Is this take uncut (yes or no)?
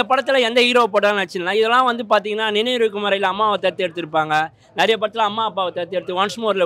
yes